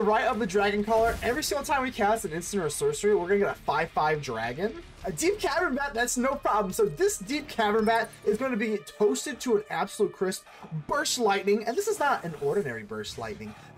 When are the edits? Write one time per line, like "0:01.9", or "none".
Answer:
0:04.9